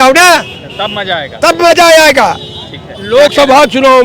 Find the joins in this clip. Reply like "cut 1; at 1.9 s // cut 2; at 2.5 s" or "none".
none